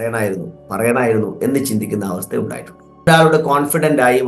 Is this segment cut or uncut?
cut